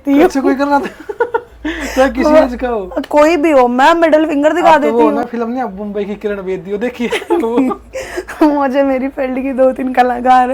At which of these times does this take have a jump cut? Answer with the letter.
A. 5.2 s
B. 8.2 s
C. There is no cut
C